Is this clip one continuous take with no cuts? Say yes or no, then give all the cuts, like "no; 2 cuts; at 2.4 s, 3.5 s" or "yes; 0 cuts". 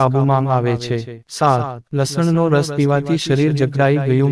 no; 1 cut; at 1.4 s